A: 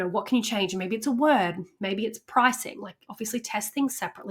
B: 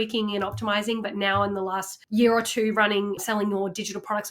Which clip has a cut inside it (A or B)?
B